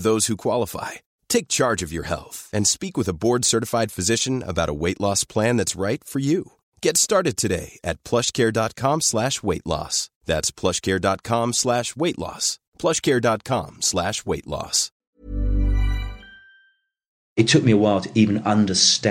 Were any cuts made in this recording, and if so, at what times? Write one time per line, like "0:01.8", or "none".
0:17.3